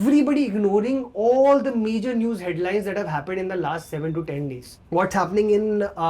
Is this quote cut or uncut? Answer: cut